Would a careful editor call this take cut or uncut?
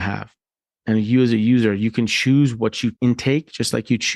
cut